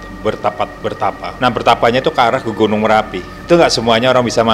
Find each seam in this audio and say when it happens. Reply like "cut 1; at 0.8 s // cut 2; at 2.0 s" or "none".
cut 1; at 1.3 s // cut 2; at 3.3 s